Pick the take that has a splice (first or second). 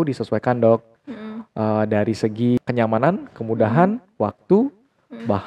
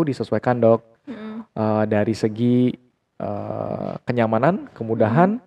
first